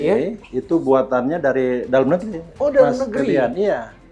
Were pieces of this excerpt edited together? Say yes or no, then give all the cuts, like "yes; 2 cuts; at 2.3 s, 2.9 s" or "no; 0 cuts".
no; 0 cuts